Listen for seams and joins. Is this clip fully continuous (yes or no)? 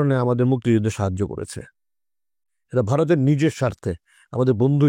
yes